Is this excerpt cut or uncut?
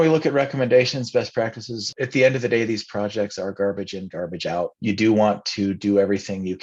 cut